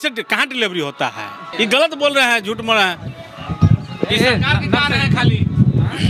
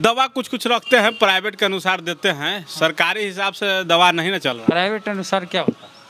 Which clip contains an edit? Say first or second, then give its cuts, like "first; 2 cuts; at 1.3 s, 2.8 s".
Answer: first; 1 cut; at 1.4 s